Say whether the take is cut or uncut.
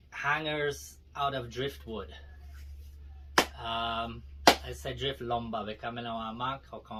uncut